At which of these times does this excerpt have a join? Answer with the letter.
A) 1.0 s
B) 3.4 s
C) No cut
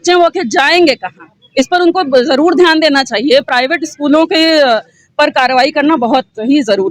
C